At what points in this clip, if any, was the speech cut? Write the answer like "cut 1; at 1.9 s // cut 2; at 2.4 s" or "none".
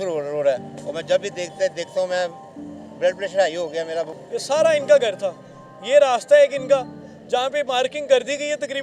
cut 1; at 4.2 s